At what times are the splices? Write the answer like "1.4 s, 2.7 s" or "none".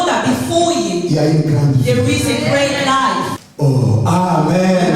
3.4 s

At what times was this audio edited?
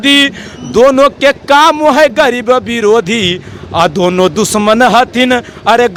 none

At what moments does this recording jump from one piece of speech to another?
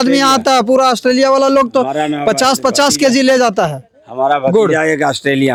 none

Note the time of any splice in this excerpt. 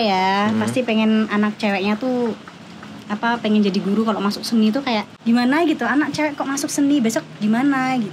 5.1 s

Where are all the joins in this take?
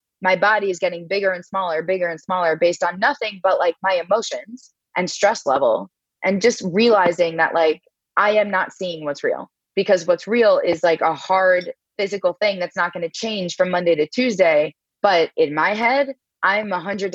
6.1 s, 11.9 s

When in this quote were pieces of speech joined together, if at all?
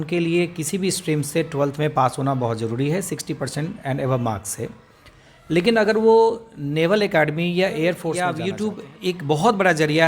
8.3 s

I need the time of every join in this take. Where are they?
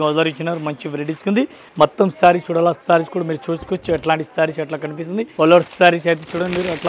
1.6 s, 5.3 s

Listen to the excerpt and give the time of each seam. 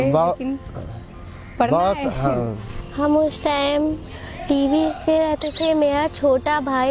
none

